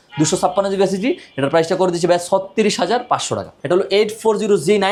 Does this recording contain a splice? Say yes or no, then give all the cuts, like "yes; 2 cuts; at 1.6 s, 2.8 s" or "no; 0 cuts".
no; 0 cuts